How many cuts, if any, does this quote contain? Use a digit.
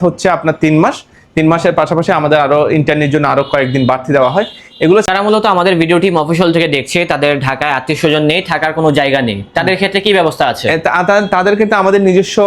1